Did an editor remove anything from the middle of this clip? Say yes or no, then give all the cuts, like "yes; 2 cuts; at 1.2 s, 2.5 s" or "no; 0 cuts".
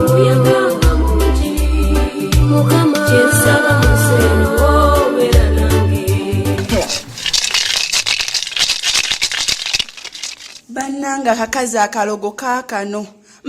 yes; 1 cut; at 6.6 s